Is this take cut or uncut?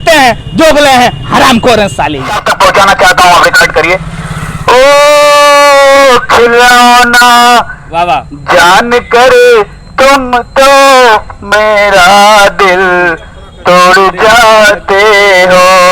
cut